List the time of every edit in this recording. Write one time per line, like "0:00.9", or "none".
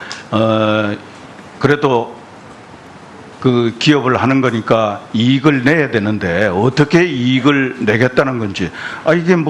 none